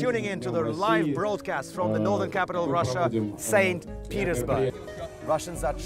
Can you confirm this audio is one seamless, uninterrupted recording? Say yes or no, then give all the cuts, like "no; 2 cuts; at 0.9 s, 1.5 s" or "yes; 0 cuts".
no; 1 cut; at 4.7 s